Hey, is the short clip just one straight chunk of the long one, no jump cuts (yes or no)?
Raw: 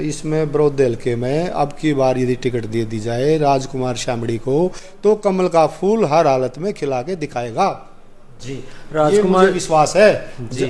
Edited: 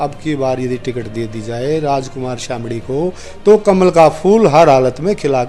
yes